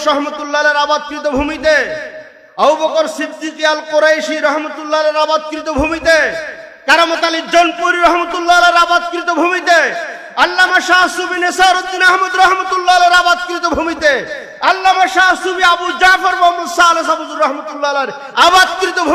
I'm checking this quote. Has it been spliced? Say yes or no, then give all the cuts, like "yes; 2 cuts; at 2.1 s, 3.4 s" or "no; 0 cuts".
no; 0 cuts